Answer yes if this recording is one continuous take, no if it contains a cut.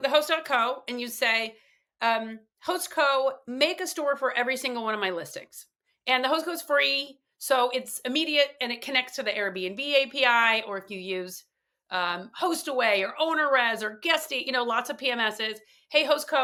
yes